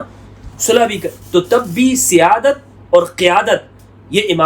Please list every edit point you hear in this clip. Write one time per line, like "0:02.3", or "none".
none